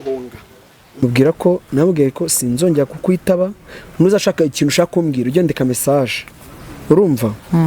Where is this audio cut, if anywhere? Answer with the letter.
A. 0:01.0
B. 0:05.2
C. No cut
A